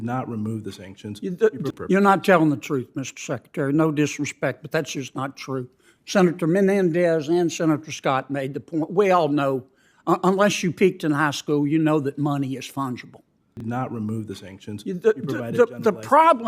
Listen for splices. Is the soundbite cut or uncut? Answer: cut